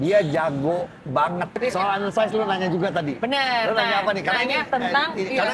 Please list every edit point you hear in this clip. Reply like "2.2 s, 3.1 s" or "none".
1.5 s